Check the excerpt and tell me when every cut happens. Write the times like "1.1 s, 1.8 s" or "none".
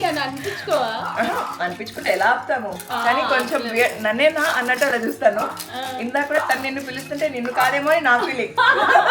none